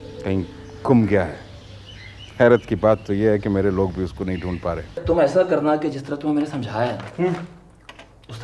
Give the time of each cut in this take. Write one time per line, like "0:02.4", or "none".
0:05.0